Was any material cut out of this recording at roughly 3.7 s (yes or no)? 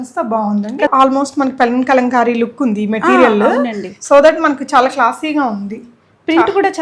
no